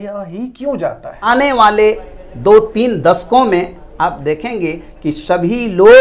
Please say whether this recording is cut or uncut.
cut